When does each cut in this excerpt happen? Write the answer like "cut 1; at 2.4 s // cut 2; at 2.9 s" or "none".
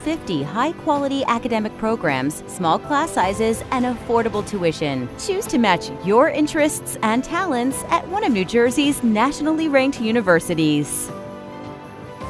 cut 1; at 10.9 s